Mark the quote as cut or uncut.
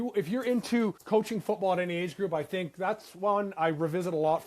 cut